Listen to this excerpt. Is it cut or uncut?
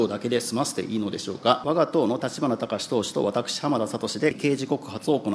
cut